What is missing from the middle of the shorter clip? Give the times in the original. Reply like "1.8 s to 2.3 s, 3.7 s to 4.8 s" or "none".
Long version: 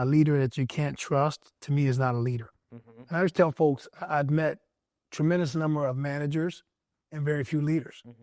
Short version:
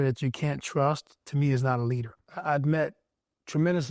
2.6 s to 3.9 s